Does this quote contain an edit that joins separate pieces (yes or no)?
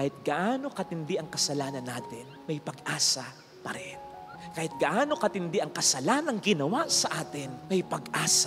no